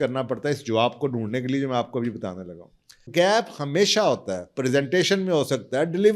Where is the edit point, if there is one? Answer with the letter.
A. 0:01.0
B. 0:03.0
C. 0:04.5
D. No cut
B